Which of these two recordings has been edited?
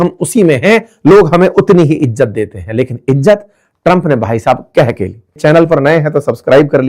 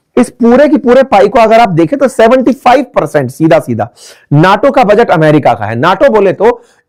first; 1 cut; at 5.2 s

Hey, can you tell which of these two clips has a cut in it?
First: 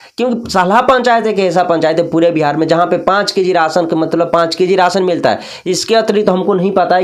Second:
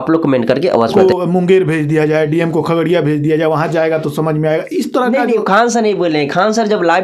second; 1 cut; at 0.9 s

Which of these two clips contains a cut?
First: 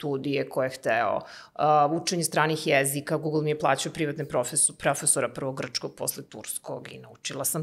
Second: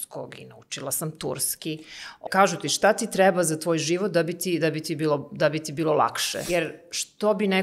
second; 2 cuts; at 2.2 s, 6.3 s

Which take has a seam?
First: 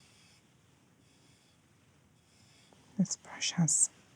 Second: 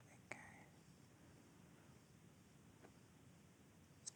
first; 1 cut; at 2.7 s

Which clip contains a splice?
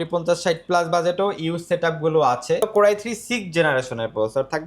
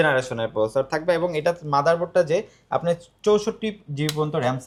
first; 1 cut; at 2.6 s

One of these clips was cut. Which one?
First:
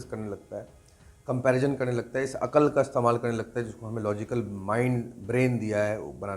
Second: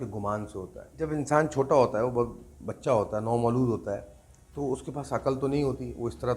second; 1 cut; at 1.1 s

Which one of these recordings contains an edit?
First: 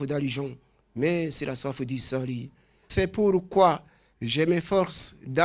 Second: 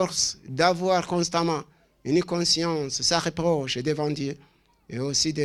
first; 1 cut; at 2.9 s

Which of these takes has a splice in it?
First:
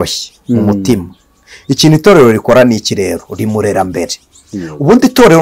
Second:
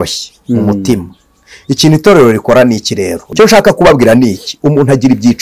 second; 1 cut; at 3.3 s

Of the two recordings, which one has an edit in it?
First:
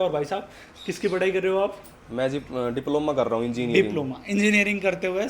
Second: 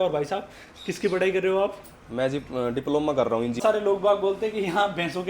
second; 1 cut; at 3.6 s

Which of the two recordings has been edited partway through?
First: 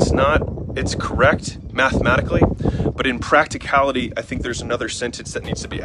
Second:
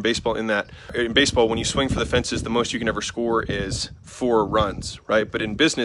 second; 1 cut; at 0.9 s

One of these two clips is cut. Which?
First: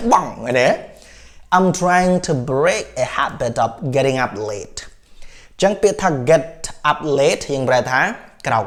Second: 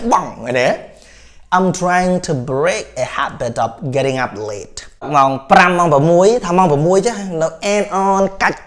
second; 1 cut; at 5.1 s

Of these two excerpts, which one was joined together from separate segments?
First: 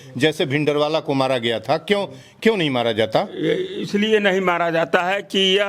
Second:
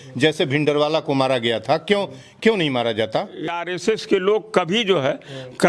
second; 1 cut; at 3.5 s

